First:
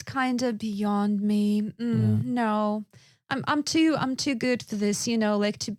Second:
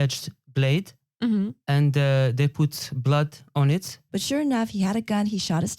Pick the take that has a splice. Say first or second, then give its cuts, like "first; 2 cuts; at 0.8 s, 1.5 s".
second; 1 cut; at 4.0 s